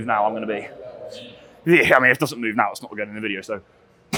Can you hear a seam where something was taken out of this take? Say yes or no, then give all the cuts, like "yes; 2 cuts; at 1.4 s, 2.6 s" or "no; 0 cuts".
no; 0 cuts